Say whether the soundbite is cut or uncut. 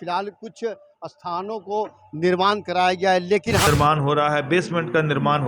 cut